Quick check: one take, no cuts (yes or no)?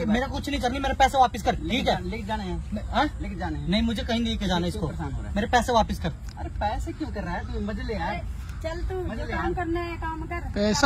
yes